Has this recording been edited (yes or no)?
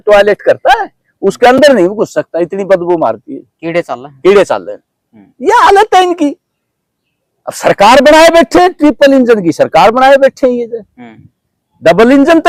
no